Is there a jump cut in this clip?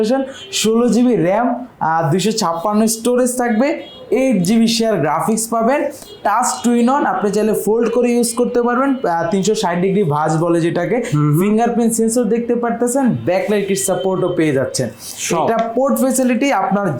no; 0 cuts

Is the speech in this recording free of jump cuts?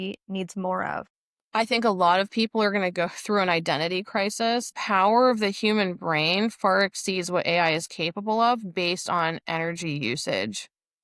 no; 2 cuts; at 1.2 s, 4.8 s

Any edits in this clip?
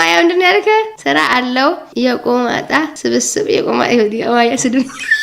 no; 0 cuts

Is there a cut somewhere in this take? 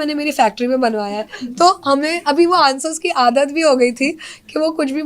no; 0 cuts

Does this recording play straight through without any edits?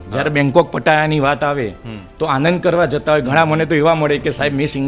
yes; 0 cuts

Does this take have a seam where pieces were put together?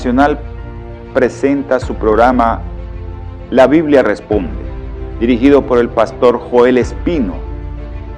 yes; 1 cut; at 1.4 s

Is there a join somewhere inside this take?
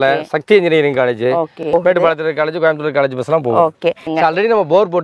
yes; 2 cuts; at 1.7 s, 4.1 s

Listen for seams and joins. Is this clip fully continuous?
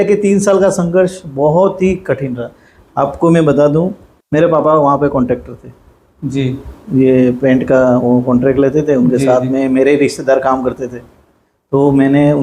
yes; 0 cuts

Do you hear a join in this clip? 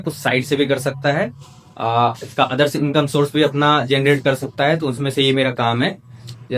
no; 0 cuts

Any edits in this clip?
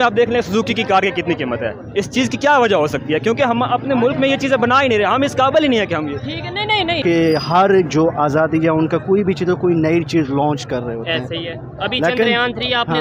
yes; 1 cut; at 7.0 s

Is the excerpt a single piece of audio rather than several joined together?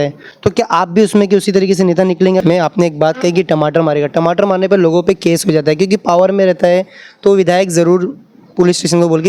no; 1 cut; at 2.4 s

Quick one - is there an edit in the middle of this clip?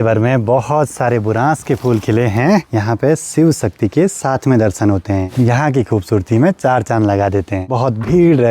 yes; 3 cuts; at 2.7 s, 5.3 s, 7.6 s

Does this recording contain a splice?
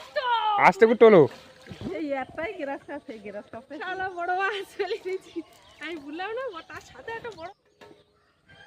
yes; 2 cuts; at 1.9 s, 7.5 s

